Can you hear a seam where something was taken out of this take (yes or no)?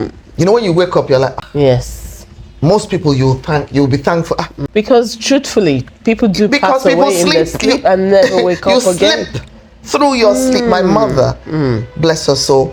no